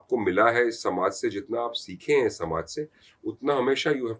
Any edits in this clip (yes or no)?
no